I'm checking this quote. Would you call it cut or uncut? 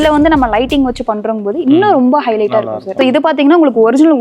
cut